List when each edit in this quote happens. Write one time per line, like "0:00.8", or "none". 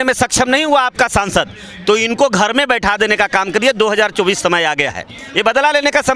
none